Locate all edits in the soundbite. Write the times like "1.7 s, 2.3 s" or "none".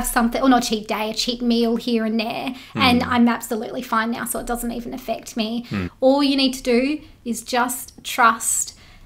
5.9 s